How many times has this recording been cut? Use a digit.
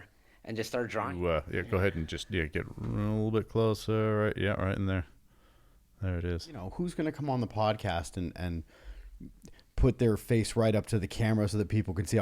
2